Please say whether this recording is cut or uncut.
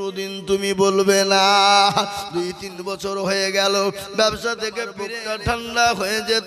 cut